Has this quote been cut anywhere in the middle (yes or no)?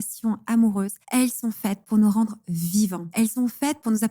yes